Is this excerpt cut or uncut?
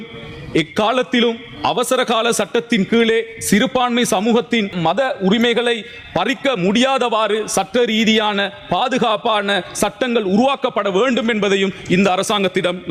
uncut